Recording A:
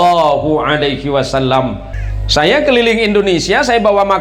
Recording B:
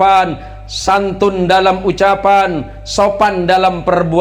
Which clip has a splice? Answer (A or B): A